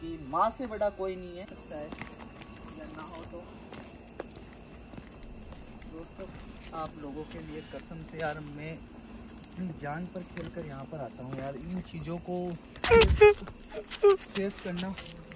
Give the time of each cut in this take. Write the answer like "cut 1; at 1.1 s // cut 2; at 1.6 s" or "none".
cut 1; at 1.6 s